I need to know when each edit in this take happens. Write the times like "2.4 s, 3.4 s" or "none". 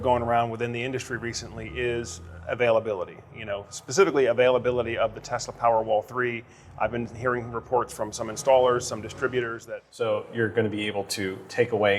9.6 s